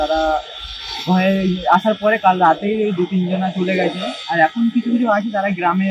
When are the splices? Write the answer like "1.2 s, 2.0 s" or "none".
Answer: none